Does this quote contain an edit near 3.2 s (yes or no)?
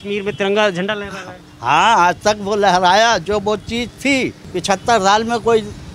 no